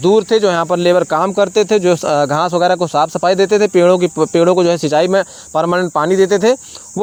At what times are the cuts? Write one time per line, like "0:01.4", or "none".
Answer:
none